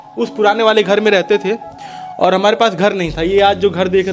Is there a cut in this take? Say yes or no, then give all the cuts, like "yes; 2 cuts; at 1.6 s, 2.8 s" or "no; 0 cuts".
no; 0 cuts